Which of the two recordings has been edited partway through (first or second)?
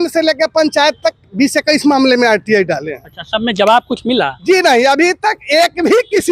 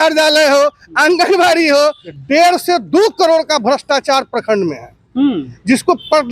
second